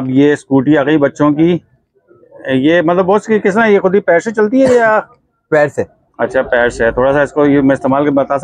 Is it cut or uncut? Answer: uncut